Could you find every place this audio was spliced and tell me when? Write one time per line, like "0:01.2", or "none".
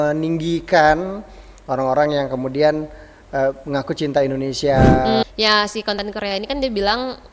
0:05.2